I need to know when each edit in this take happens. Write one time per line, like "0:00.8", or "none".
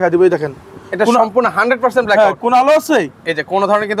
none